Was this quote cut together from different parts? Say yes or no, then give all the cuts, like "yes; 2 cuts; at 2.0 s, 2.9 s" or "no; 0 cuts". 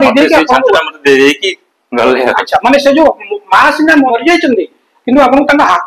yes; 1 cut; at 4.1 s